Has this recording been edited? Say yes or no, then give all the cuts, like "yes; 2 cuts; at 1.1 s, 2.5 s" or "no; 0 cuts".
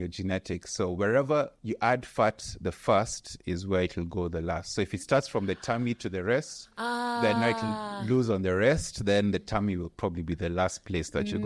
no; 0 cuts